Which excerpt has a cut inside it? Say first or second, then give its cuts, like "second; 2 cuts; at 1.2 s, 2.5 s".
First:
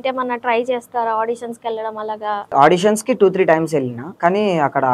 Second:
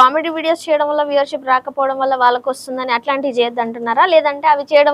first; 2 cuts; at 2.5 s, 4.0 s